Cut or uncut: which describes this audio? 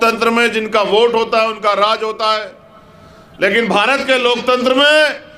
uncut